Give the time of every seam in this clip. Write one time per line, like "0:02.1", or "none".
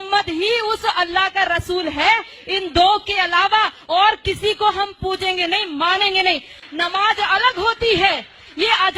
0:06.6